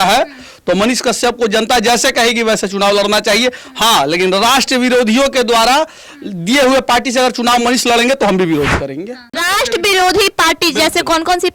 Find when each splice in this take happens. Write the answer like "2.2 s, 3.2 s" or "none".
9.4 s